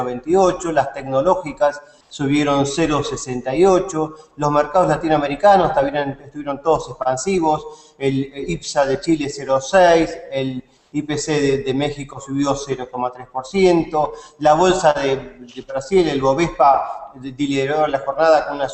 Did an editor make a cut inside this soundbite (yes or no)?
no